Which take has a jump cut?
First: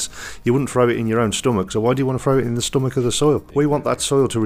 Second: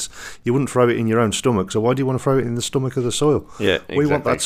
first; 1 cut; at 3.5 s

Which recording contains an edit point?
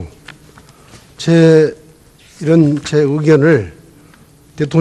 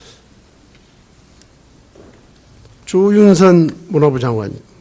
second; 1 cut; at 3.6 s

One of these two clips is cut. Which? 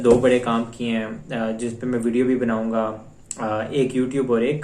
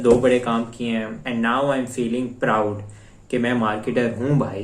second; 1 cut; at 1.2 s

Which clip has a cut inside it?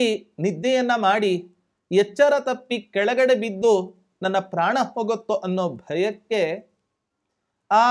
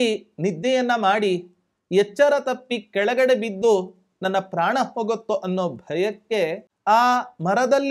second; 1 cut; at 6.7 s

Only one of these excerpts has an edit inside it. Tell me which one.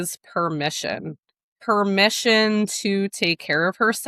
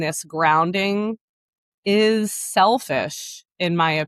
first; 1 cut; at 1.5 s

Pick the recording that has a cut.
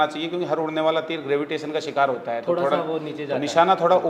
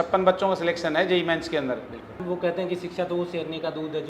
second; 1 cut; at 2.2 s

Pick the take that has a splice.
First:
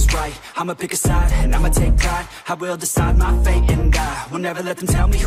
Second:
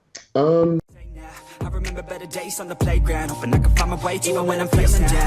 second; 1 cut; at 1.0 s

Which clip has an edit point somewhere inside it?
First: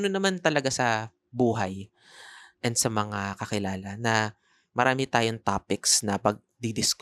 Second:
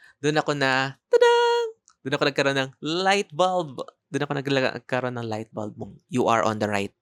second; 1 cut; at 5.8 s

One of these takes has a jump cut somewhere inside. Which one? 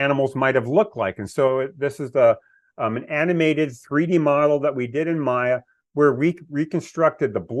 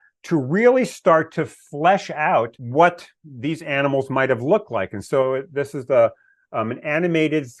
second; 1 cut; at 2.6 s

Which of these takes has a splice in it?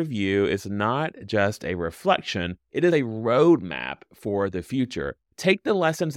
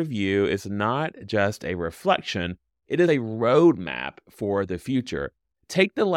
first; 2 cuts; at 2.6 s, 5.2 s

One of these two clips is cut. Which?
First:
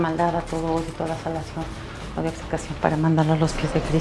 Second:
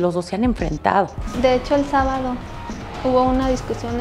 second; 1 cut; at 1.3 s

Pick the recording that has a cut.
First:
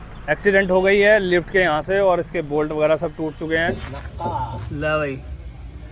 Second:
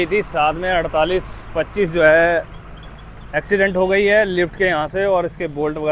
first; 1 cut; at 3.8 s

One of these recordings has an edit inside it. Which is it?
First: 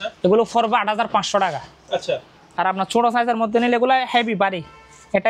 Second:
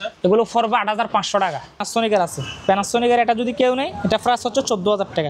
second; 1 cut; at 1.8 s

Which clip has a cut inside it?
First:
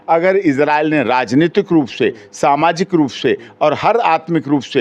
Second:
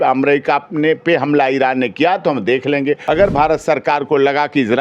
second; 1 cut; at 3.0 s

